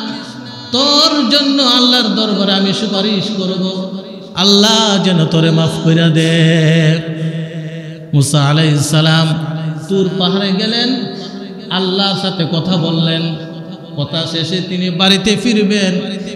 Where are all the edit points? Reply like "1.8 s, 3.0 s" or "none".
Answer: none